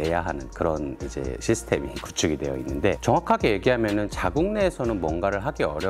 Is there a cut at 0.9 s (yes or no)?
no